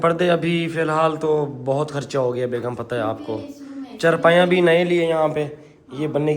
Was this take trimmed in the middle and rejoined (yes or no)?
no